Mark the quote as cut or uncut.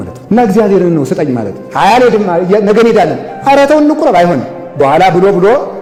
uncut